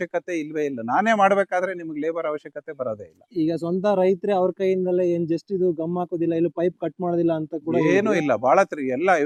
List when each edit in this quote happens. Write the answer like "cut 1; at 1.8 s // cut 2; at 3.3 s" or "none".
none

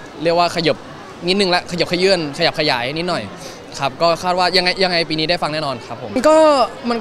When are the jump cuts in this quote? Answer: cut 1; at 5.9 s

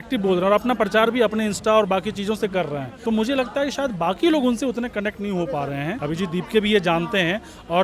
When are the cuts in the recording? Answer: cut 1; at 2.9 s // cut 2; at 6.0 s

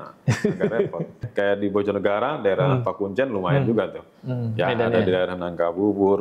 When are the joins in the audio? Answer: cut 1; at 1.3 s

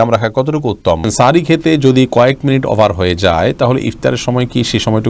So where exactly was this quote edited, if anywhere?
cut 1; at 1.1 s

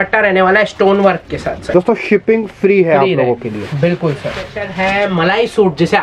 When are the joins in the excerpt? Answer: cut 1; at 1.5 s // cut 2; at 4.6 s

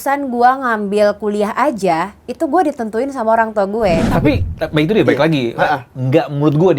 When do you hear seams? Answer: cut 1; at 4.1 s

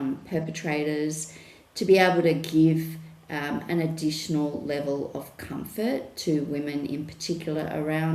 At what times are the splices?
none

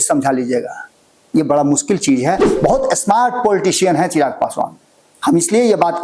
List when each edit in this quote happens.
cut 1; at 2.5 s

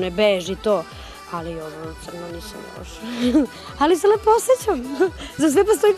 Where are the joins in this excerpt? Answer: none

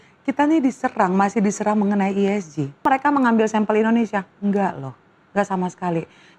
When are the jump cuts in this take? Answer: cut 1; at 2.8 s

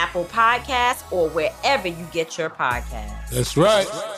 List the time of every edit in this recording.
none

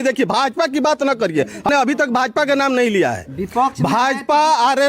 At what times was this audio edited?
cut 1; at 1.7 s

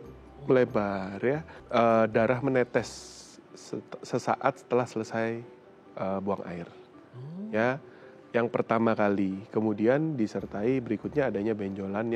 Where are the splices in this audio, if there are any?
cut 1; at 1.5 s

